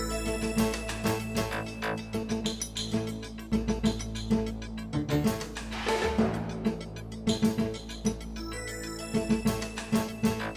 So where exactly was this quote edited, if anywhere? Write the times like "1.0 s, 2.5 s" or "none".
1.0 s